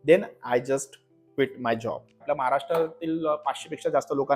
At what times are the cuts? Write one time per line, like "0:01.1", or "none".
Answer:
0:02.2